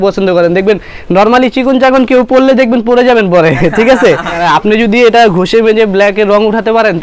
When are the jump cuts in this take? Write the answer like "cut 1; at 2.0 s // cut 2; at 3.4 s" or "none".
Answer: cut 1; at 4.4 s